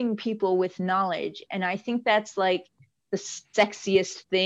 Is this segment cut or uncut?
uncut